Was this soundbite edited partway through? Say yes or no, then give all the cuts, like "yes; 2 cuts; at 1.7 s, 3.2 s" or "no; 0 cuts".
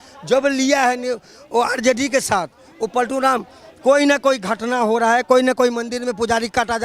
no; 0 cuts